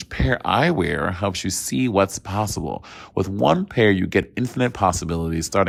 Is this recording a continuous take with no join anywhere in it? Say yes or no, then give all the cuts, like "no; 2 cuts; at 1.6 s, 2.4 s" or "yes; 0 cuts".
yes; 0 cuts